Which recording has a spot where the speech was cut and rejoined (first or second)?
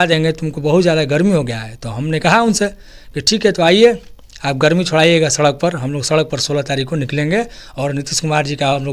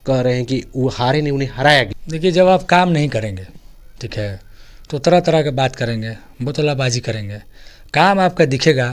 second